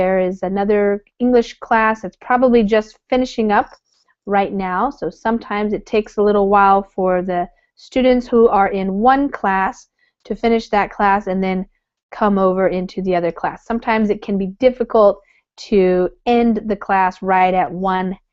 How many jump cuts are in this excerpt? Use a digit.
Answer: 1